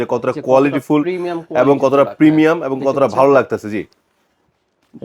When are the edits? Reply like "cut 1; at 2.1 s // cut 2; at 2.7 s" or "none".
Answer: none